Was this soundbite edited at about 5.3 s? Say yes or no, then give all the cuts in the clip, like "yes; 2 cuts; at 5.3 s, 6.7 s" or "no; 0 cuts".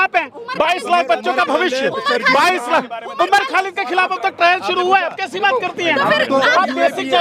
no; 0 cuts